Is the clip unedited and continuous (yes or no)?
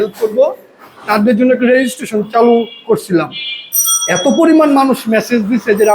yes